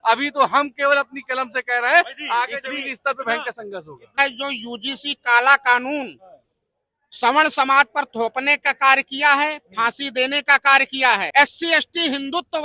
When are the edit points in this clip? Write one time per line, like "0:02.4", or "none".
0:04.2
0:11.3

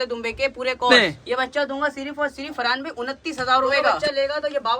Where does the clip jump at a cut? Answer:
0:00.9
0:04.0

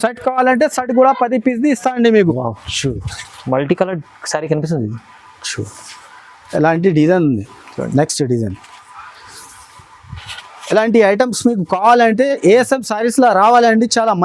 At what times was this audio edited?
0:02.3

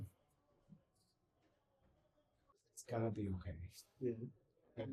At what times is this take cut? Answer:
0:02.7

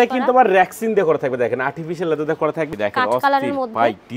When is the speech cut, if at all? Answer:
0:02.7

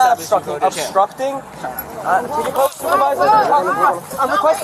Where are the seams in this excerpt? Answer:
none

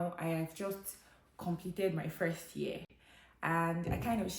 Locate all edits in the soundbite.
none

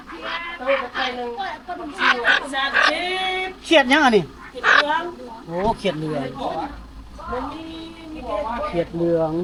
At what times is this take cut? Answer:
none

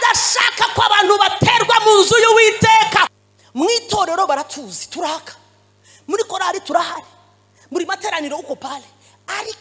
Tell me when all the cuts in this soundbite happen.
0:03.2

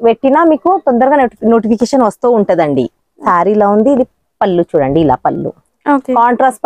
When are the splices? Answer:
0:03.2

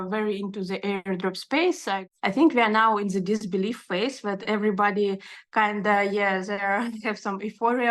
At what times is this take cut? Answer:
0:02.0

